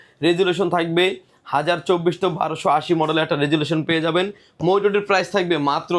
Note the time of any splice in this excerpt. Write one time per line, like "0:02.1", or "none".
none